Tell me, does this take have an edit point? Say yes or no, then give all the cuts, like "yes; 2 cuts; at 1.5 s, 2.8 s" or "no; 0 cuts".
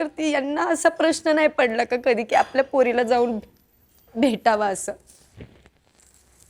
no; 0 cuts